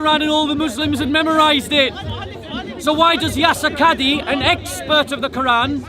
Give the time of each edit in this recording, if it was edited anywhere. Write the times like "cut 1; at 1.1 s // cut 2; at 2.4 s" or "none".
none

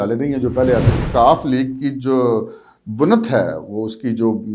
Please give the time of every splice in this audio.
cut 1; at 1.0 s

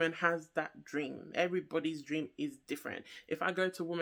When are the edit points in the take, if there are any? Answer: none

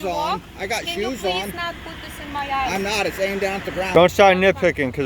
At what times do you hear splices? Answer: cut 1; at 3.9 s

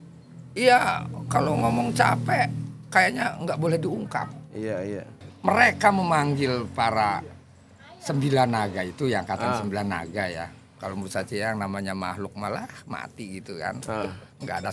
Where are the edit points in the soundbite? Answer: cut 1; at 5.2 s

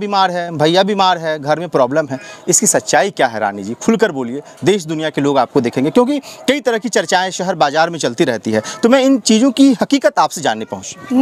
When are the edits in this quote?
none

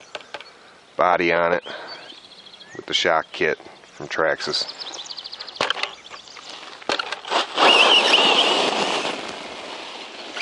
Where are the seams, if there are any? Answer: none

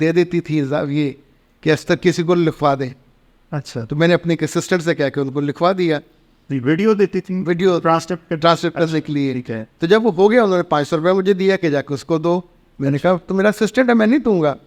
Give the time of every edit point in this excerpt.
none

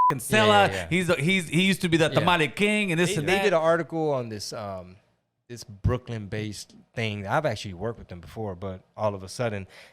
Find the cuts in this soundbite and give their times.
cut 1; at 3.3 s

